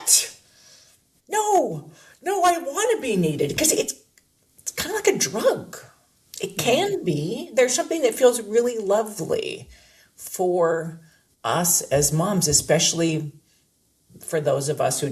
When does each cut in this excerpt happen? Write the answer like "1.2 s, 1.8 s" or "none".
1.1 s